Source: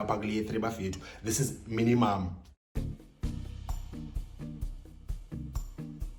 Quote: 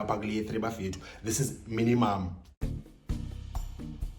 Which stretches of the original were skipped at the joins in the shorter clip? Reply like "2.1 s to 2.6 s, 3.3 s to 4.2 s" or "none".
2.5 s to 2.6 s